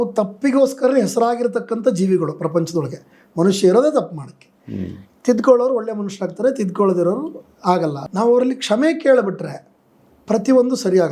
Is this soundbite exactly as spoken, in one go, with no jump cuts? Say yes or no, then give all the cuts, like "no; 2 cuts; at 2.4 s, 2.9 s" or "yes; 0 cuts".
no; 1 cut; at 8.0 s